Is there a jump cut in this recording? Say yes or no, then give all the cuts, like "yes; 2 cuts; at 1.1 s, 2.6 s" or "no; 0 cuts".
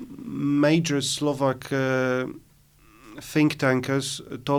no; 0 cuts